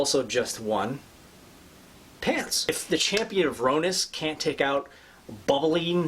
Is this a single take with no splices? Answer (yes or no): no